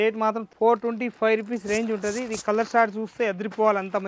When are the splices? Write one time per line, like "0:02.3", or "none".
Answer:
none